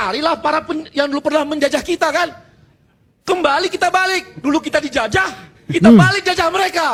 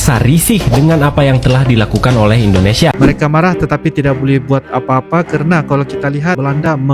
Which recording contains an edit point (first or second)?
second